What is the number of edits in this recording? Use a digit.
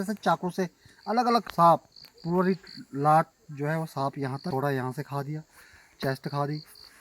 2